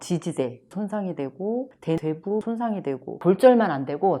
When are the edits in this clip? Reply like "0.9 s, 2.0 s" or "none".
3.2 s